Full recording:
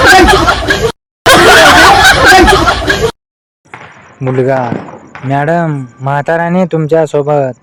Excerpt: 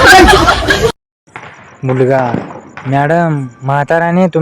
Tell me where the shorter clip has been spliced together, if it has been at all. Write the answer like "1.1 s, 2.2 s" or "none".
1.1 s